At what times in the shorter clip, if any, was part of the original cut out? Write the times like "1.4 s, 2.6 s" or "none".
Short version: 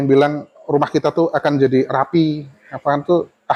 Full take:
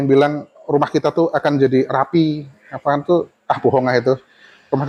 none

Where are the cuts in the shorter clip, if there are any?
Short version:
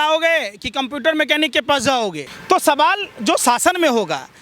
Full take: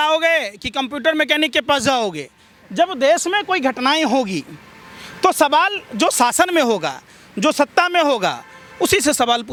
2.3 s

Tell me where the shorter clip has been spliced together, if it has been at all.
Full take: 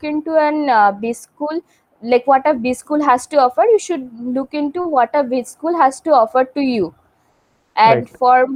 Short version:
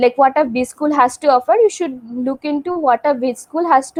none

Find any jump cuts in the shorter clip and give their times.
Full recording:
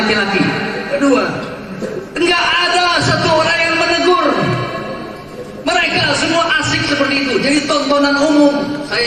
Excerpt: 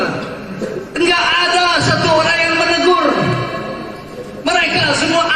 none

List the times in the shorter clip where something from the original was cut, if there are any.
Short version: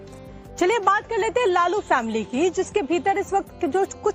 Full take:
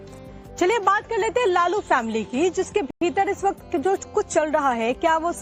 2.9 s

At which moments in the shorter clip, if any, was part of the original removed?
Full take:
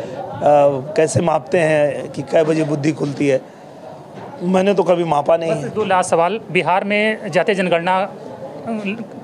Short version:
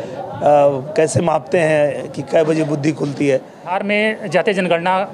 3.7 s

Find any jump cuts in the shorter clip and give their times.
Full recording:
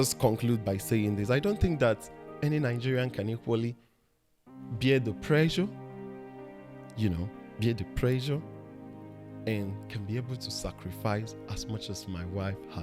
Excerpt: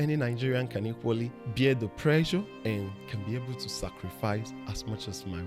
1.4 s, 2.5 s

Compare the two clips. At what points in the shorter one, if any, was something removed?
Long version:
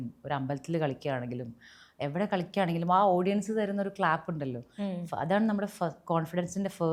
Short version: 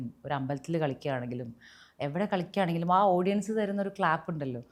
none

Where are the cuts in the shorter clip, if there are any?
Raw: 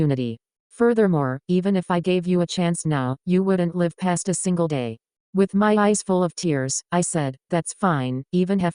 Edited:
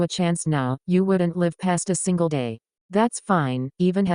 2.9 s

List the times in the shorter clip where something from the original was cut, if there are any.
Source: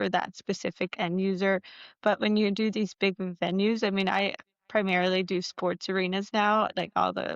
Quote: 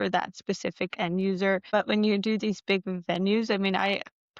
1.6 s

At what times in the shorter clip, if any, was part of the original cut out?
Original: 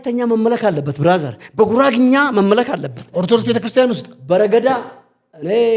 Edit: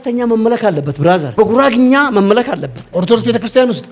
1.3 s

